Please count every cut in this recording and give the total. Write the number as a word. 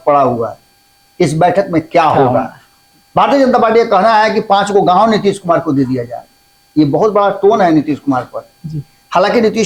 zero